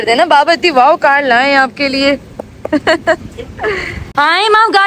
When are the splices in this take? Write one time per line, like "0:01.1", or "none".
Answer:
0:03.9